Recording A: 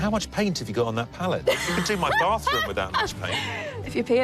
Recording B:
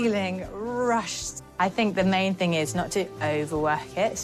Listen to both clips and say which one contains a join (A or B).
A